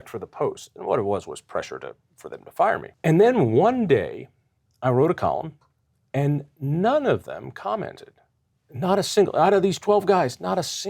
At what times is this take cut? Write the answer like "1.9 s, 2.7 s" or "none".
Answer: 2.9 s

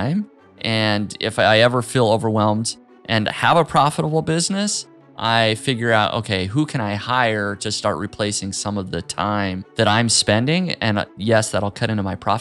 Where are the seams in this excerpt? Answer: 9.6 s, 11.1 s

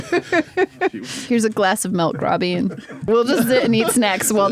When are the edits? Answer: 1.0 s, 2.9 s

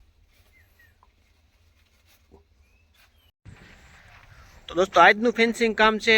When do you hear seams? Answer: 3.3 s

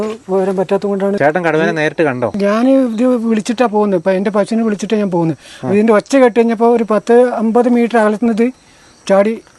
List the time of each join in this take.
1.2 s, 2.3 s

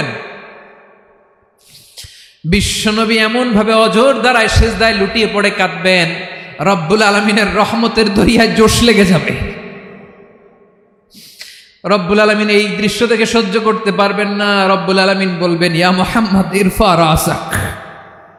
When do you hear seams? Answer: none

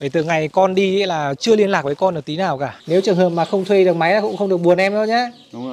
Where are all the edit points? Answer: 2.7 s

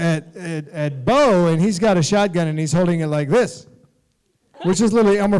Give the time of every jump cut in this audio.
4.4 s

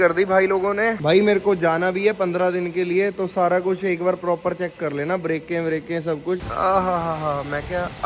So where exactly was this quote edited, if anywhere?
1.0 s, 6.4 s

